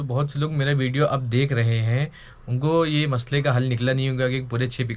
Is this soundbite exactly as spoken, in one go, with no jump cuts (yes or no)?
yes